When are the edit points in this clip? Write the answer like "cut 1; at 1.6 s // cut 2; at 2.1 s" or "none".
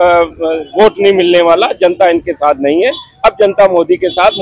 none

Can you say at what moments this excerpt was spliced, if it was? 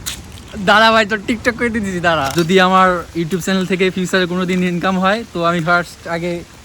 cut 1; at 2.3 s

